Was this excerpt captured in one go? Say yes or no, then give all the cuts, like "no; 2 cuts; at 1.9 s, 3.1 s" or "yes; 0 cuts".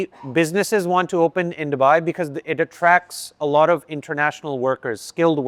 yes; 0 cuts